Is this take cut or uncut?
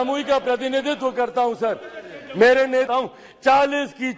cut